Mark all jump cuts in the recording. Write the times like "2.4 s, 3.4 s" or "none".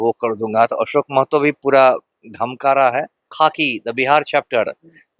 3.3 s